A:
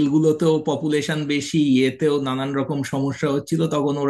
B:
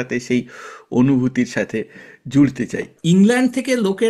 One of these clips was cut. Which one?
B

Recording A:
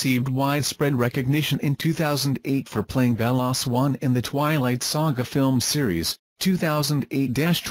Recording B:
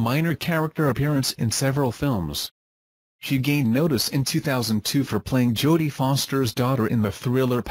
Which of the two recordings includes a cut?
A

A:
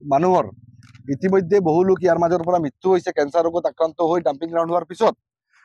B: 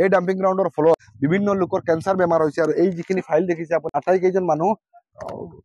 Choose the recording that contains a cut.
B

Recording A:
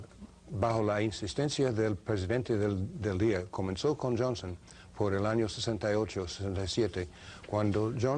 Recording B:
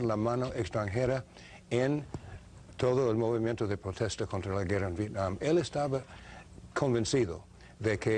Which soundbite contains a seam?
B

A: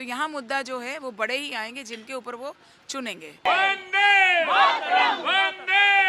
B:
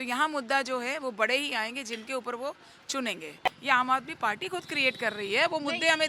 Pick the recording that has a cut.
B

